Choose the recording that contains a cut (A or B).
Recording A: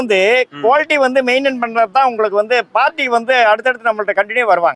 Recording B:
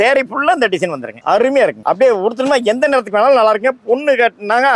B